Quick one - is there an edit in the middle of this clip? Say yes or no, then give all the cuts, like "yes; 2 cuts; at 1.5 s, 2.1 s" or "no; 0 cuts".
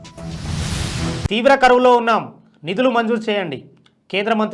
yes; 1 cut; at 1.1 s